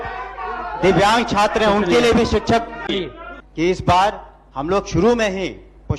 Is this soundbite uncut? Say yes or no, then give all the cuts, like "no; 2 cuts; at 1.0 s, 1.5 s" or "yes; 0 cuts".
no; 1 cut; at 2.8 s